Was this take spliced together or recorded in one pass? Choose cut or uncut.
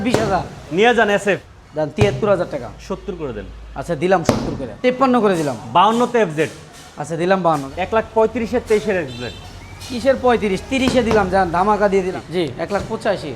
cut